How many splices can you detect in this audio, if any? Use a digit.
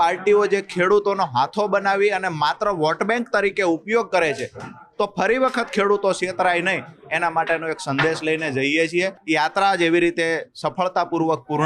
1